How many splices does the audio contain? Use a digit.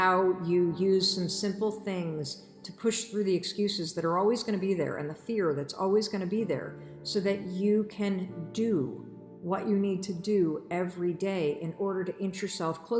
0